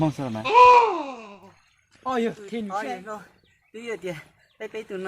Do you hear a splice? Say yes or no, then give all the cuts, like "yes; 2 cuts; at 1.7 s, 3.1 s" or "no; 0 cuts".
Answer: yes; 1 cut; at 2.9 s